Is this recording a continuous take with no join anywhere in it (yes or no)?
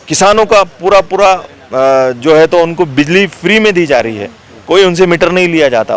yes